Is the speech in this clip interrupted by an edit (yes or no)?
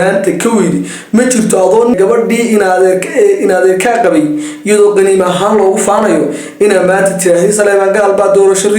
yes